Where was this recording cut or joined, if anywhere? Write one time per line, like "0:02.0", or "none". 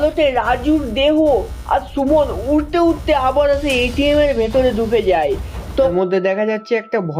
0:05.9